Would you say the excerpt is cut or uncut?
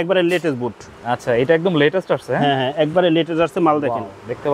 uncut